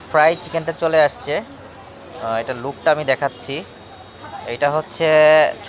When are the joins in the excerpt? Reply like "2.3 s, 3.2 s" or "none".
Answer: none